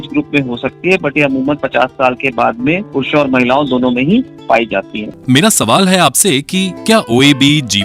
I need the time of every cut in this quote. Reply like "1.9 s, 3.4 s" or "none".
5.0 s